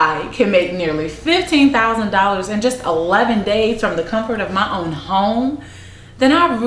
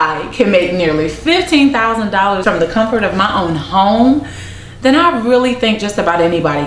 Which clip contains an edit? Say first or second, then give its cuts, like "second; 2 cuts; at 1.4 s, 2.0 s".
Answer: second; 1 cut; at 2.4 s